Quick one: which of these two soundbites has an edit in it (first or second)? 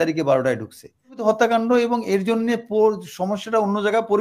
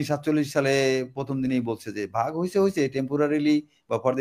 first